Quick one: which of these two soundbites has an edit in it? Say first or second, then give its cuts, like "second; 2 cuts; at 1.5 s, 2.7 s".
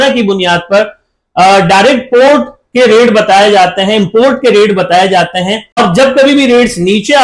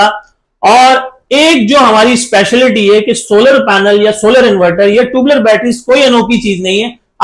first; 1 cut; at 5.8 s